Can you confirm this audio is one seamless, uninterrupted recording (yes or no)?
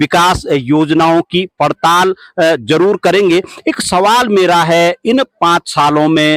yes